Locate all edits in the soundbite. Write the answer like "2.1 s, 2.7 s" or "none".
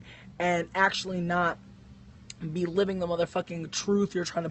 0.9 s